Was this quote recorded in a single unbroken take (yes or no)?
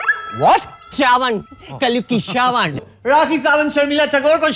no